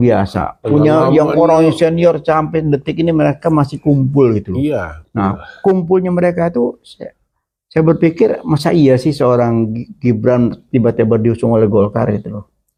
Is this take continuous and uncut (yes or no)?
yes